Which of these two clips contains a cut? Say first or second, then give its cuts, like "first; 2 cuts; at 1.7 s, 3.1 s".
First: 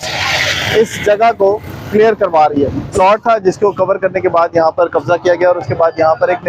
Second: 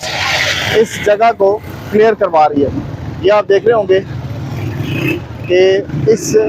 first; 1 cut; at 2.9 s